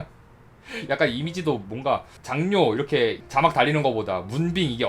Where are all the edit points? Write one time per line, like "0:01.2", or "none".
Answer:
0:02.2
0:03.2